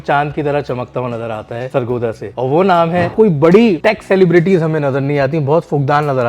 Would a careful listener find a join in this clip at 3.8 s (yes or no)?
yes